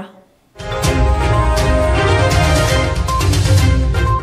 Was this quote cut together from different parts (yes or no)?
yes